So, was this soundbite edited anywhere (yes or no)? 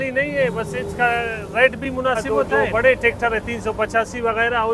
yes